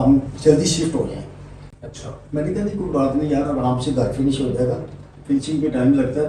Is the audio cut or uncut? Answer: uncut